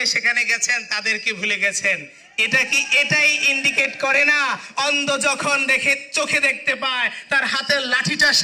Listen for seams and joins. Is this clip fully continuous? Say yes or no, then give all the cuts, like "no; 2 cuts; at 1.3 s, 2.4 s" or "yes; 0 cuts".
yes; 0 cuts